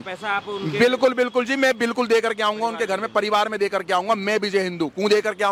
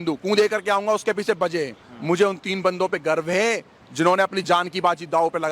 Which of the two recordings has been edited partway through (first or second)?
second